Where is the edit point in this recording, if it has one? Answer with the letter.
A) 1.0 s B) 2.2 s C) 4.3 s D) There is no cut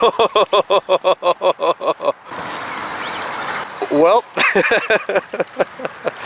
B